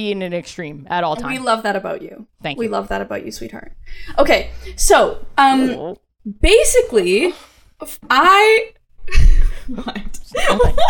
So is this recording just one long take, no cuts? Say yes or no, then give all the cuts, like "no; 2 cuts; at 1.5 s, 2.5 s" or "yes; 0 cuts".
yes; 0 cuts